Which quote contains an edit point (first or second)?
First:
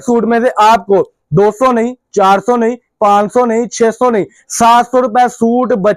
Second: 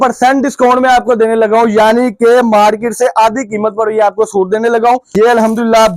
second